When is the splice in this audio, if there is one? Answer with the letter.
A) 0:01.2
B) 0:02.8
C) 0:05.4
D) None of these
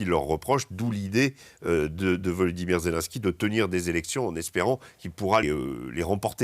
C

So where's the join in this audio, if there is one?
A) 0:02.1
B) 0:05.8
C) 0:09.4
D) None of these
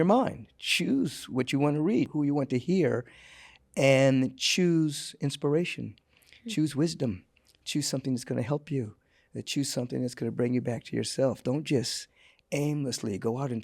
A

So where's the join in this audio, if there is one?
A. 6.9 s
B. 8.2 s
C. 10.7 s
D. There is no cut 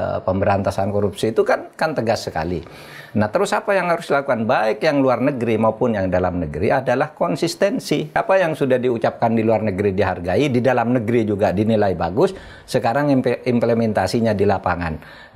B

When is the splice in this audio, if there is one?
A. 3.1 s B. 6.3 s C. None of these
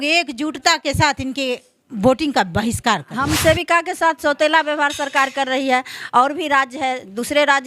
A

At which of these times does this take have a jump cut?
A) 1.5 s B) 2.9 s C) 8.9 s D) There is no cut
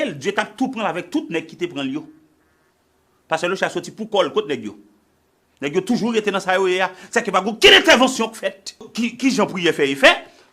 C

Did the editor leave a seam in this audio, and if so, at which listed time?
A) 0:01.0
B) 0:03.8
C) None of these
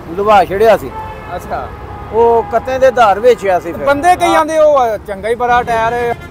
C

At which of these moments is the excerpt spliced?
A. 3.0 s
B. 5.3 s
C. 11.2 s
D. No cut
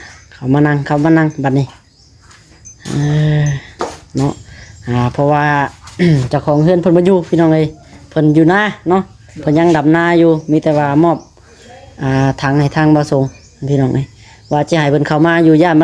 D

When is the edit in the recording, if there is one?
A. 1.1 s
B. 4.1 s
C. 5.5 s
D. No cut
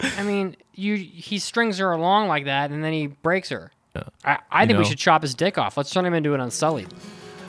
B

